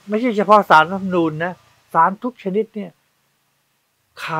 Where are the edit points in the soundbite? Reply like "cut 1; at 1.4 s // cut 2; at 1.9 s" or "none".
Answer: none